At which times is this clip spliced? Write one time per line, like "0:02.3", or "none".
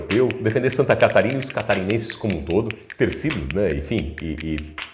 0:02.8